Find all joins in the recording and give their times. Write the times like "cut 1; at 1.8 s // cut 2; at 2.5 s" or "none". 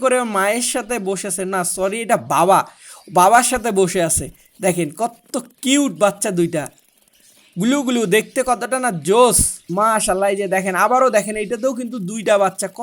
cut 1; at 9.5 s